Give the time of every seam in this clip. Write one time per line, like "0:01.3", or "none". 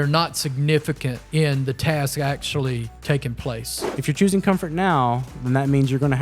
0:01.1
0:02.9
0:03.9